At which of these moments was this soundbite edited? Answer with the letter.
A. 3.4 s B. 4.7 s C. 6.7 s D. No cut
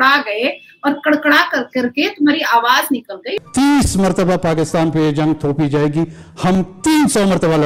D